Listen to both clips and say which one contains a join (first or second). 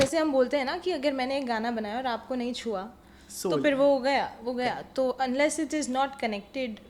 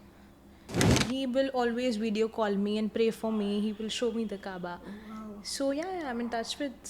second